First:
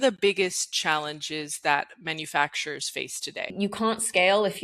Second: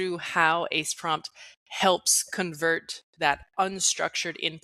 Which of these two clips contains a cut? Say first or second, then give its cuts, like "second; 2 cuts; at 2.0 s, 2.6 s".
first; 1 cut; at 3.5 s